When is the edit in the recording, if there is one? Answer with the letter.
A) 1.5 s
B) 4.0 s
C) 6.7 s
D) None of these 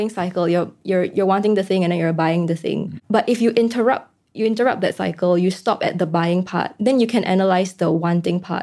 D